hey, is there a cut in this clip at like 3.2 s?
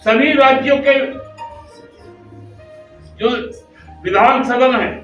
yes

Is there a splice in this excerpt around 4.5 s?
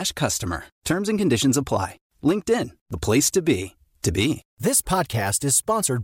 yes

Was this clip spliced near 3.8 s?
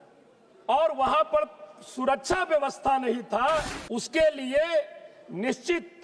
yes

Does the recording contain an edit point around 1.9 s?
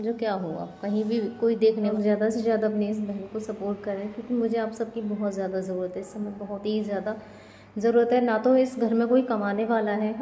yes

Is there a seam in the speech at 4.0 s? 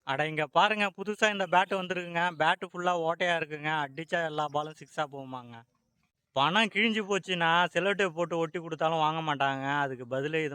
no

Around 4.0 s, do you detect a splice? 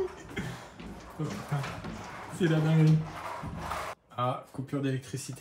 yes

